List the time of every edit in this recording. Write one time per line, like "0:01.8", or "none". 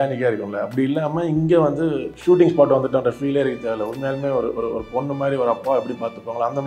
0:02.1